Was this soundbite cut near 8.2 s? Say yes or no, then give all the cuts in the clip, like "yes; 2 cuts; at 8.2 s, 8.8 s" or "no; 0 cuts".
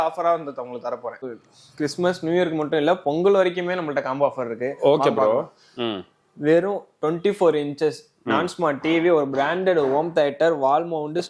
no; 1 cut; at 1.2 s